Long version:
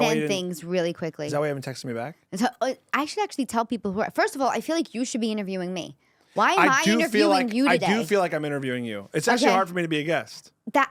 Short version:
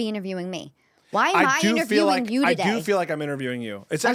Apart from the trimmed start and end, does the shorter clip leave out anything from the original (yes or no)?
no